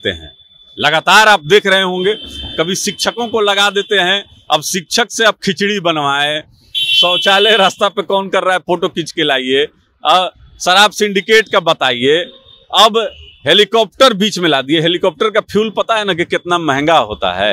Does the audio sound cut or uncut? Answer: uncut